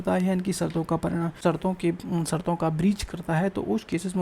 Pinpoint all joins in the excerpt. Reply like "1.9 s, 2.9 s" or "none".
1.3 s